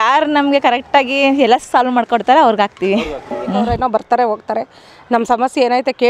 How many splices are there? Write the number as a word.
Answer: one